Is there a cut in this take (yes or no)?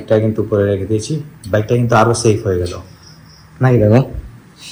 no